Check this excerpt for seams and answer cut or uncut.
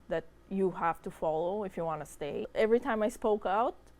cut